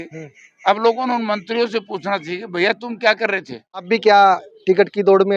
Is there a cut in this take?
yes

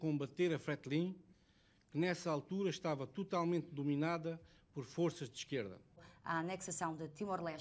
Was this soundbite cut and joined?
yes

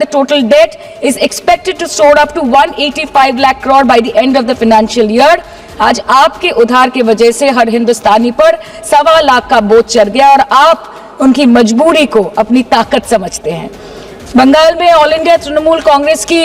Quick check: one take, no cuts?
yes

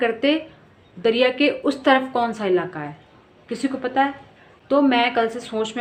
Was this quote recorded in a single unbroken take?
yes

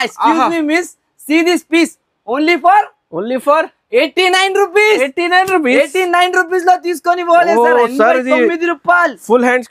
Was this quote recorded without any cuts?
yes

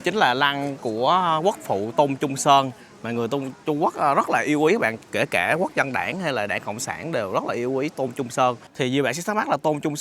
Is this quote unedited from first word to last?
no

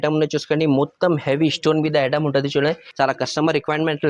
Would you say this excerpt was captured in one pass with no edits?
no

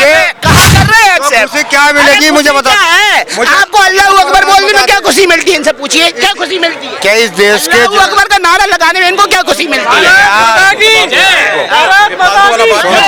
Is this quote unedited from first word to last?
yes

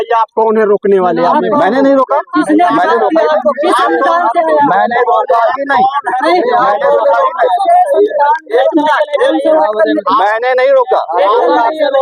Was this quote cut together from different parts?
no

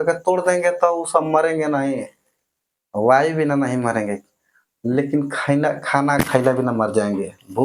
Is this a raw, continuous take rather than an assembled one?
yes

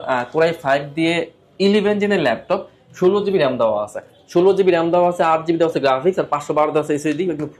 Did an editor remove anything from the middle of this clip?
no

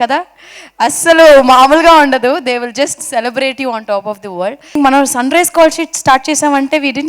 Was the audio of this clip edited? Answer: yes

